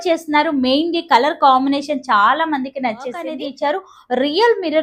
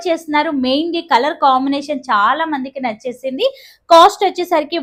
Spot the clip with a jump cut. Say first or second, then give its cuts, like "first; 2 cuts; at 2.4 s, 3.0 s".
first; 1 cut; at 3.3 s